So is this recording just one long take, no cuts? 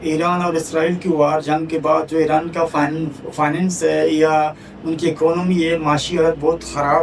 yes; 0 cuts

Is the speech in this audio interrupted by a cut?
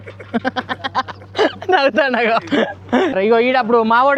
yes; 1 cut; at 3.1 s

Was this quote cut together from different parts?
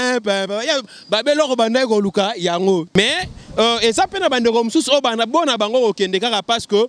yes; 1 cut; at 3.0 s

